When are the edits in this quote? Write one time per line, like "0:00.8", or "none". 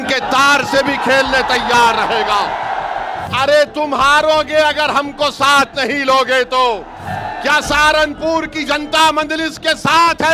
0:03.2
0:07.0